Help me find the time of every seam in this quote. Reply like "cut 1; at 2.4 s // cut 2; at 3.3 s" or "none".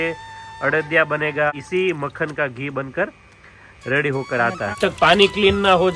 cut 1; at 1.5 s // cut 2; at 4.8 s